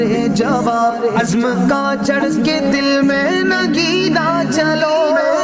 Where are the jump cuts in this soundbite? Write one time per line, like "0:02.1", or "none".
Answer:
none